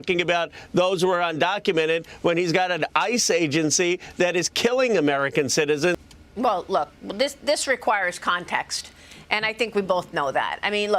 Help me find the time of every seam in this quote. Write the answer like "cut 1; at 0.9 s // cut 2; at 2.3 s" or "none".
cut 1; at 6.1 s